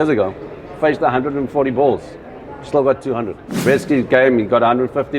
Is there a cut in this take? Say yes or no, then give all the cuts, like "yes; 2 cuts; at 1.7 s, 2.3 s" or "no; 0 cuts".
yes; 1 cut; at 3.4 s